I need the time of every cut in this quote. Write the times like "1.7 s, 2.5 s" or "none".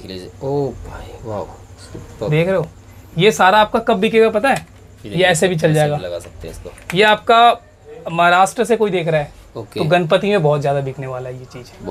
none